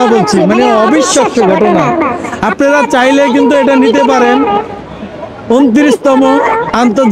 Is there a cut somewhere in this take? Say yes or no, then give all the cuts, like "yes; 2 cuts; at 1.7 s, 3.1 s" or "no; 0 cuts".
no; 0 cuts